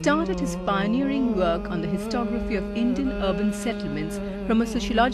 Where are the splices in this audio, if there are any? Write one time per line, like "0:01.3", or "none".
0:01.4